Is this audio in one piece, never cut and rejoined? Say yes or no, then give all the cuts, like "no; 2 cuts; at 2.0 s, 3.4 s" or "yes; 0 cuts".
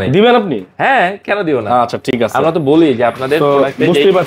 yes; 0 cuts